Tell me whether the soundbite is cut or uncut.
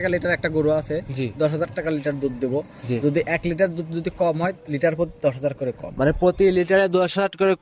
uncut